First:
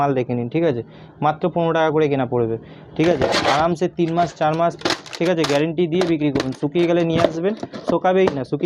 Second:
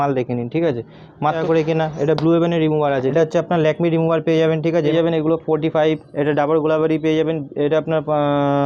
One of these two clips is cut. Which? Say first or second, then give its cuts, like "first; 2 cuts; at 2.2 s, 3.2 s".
second; 3 cuts; at 1.4 s, 3.1 s, 4.9 s